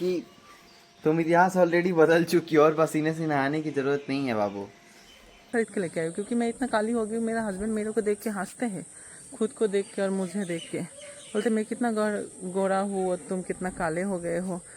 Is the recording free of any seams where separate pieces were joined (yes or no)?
no